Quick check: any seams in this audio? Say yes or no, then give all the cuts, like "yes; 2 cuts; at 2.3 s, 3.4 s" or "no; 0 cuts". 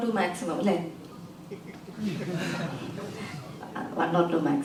no; 0 cuts